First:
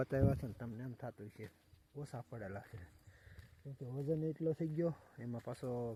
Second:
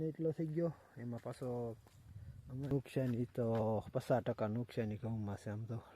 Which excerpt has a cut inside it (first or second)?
second